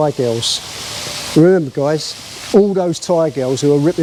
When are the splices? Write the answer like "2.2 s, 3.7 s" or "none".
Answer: none